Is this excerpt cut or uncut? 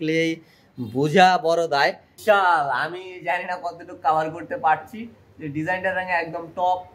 cut